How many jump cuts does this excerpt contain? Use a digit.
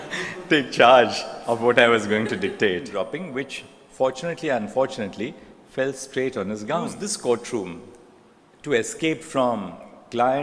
2